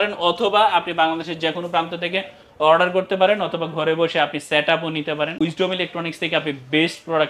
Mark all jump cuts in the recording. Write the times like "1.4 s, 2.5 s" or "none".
5.4 s